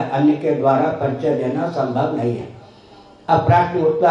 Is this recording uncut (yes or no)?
yes